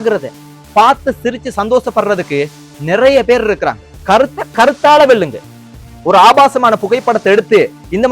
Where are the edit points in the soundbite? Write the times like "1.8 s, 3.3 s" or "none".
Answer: 3.9 s